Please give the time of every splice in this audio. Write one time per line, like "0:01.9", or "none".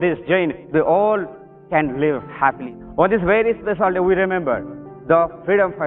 0:02.7

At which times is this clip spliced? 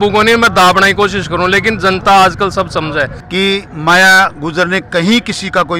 0:03.2

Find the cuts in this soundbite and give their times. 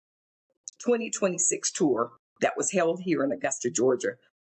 0:02.2

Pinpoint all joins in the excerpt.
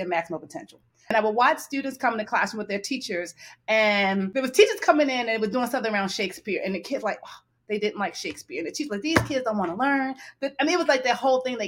0:01.1
0:04.3

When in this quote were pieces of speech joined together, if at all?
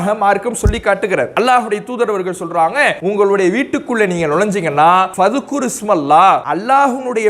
0:01.3
0:03.0
0:05.1
0:06.5

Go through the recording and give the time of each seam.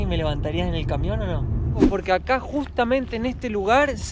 0:01.9

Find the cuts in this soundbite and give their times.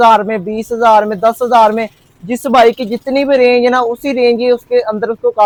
none

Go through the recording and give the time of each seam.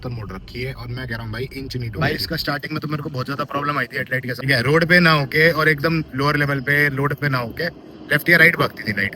0:02.0
0:04.3

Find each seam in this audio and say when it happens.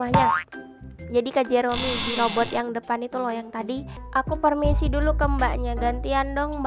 0:03.9

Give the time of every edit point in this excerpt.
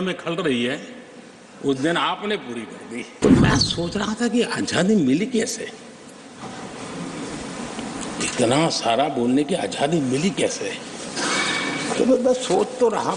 0:03.1

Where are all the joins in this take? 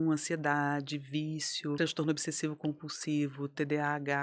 0:01.8

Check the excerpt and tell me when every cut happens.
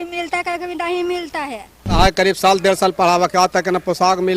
0:02.0

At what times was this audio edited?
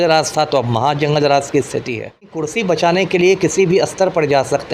0:02.4

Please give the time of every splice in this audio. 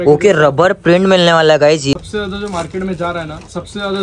0:01.9

